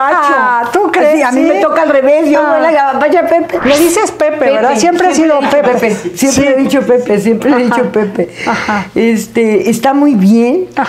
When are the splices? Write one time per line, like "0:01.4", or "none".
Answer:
0:03.6

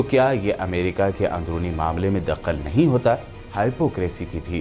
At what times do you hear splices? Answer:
0:03.4

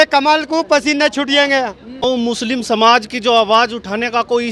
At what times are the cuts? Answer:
0:02.0

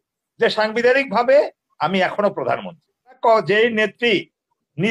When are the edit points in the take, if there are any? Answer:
0:03.2

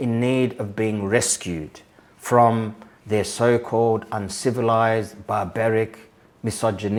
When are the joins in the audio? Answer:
none

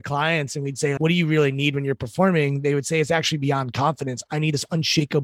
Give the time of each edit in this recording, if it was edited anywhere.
0:01.0

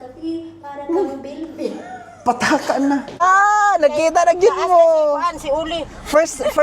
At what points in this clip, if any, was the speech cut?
0:03.2

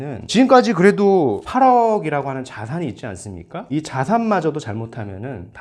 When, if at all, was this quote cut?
0:01.4

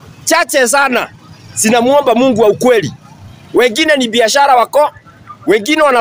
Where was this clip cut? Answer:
none

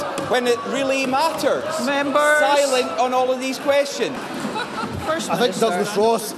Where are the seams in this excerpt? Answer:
0:04.3

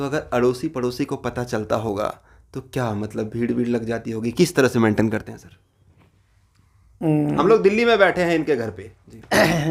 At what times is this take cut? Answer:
none

